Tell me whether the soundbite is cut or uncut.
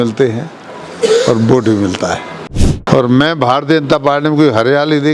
cut